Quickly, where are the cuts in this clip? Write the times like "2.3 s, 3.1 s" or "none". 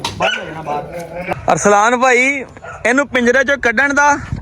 1.3 s